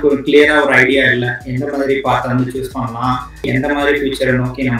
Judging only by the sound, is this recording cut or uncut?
cut